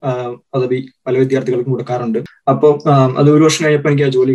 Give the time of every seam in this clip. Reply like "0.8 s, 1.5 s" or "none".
2.3 s